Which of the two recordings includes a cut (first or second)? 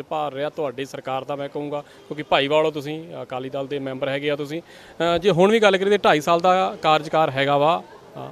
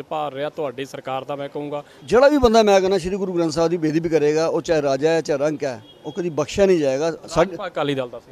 second